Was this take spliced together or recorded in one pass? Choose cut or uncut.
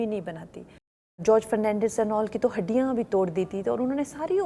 cut